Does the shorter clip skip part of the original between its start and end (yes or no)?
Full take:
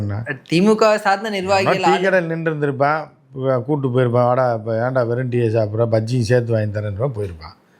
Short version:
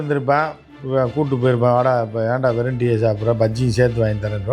no